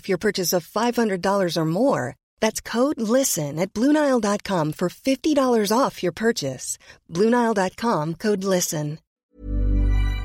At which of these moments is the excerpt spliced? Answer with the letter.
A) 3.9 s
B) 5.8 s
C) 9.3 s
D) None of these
C